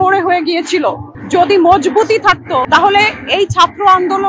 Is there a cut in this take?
yes; 2 cuts; at 1.1 s, 2.7 s

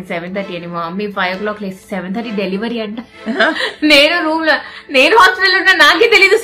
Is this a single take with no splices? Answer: yes; 0 cuts

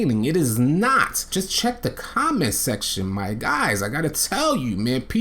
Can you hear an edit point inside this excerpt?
yes; 1 cut; at 1.2 s

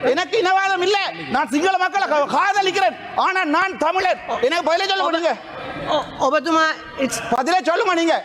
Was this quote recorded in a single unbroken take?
yes; 0 cuts

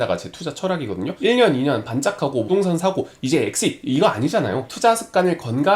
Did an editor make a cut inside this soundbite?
yes; 3 cuts; at 1.1 s, 2.5 s, 4.7 s

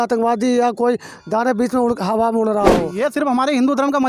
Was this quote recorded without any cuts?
no; 1 cut; at 2.9 s

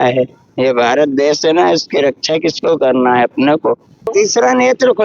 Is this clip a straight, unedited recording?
no; 1 cut; at 4.1 s

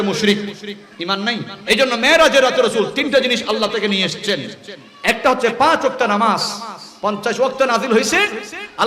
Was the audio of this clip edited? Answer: yes; 1 cut; at 1.5 s

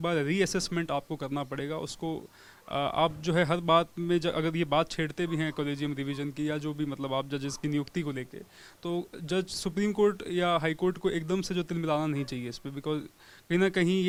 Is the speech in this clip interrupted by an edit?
no; 0 cuts

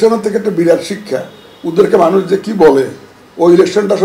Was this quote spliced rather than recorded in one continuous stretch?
no; 0 cuts

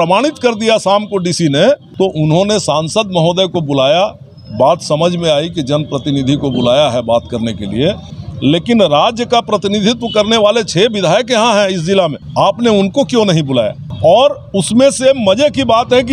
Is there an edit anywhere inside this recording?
yes; 4 cuts; at 1.9 s, 8.1 s, 12.2 s, 13.8 s

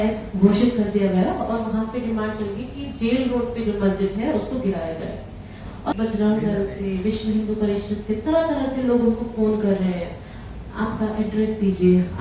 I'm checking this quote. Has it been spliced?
yes; 1 cut; at 5.9 s

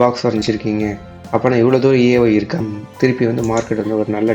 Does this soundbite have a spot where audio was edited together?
yes; 1 cut; at 2.6 s

